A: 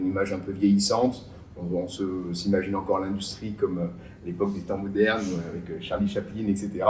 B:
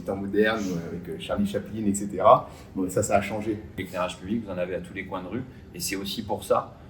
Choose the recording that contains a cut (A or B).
B